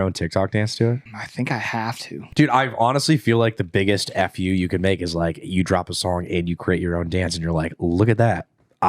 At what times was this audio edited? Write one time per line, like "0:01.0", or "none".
0:01.2
0:02.2